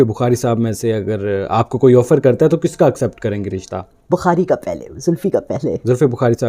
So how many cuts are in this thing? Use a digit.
0